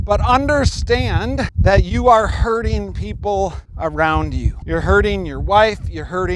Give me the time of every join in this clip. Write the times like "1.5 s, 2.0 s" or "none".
1.5 s, 3.6 s, 4.5 s